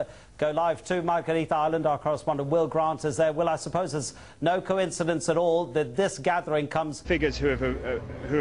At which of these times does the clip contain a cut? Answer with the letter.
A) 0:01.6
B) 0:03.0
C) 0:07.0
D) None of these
D